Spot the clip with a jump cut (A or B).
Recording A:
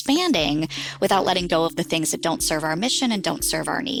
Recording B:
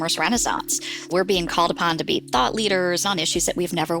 B